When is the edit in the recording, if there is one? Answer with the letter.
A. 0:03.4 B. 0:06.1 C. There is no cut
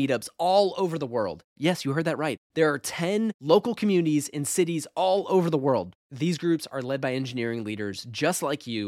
C